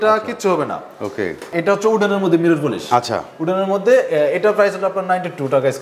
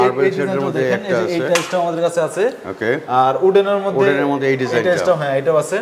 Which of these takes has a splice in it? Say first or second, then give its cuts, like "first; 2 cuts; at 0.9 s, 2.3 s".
first; 1 cut; at 1.5 s